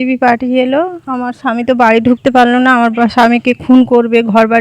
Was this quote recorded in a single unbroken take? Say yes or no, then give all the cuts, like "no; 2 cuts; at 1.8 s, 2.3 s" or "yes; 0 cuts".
no; 1 cut; at 1.0 s